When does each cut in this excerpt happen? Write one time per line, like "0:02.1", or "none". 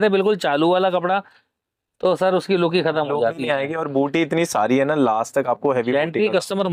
none